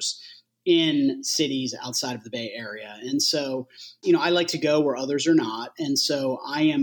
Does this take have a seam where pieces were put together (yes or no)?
yes